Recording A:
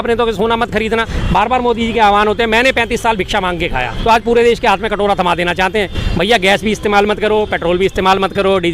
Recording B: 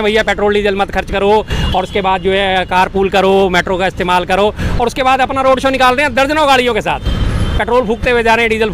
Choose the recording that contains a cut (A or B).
A